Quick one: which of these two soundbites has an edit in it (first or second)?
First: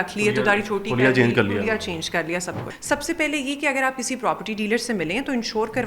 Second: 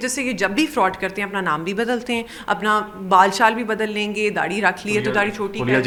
first